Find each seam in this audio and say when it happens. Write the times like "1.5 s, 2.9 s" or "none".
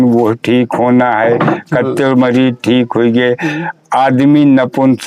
none